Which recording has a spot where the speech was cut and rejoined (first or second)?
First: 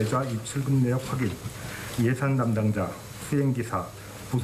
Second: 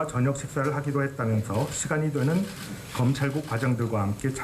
second